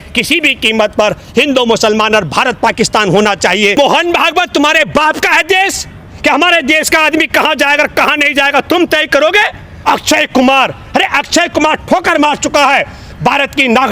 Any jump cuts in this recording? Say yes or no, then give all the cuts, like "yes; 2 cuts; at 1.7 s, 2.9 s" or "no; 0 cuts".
yes; 2 cuts; at 3.8 s, 9.7 s